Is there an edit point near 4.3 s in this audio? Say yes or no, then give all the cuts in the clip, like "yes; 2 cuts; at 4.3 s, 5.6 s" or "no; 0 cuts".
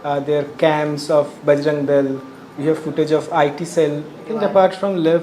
yes; 1 cut; at 4.3 s